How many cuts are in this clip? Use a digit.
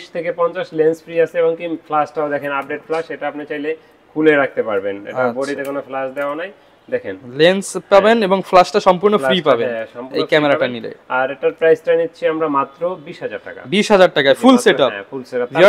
0